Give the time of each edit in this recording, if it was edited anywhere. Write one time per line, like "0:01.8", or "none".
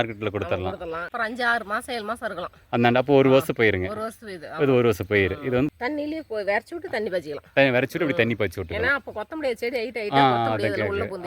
0:01.1
0:05.7